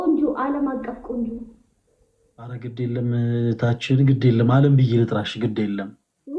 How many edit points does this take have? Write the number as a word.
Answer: one